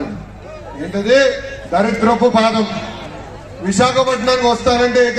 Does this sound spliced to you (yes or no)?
no